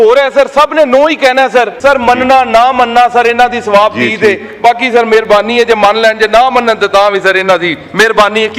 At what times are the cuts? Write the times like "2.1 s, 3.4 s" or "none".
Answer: 1.7 s